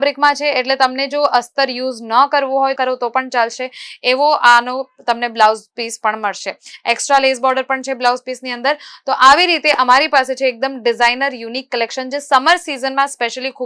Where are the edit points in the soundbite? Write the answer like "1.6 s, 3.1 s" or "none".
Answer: none